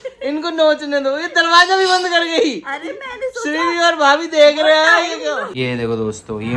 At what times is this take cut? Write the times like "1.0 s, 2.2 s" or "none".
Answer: 5.5 s